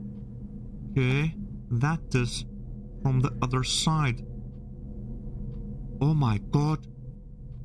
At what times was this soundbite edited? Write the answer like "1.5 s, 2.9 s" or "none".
0.9 s